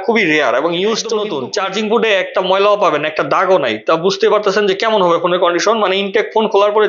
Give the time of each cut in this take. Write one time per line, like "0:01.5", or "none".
0:01.2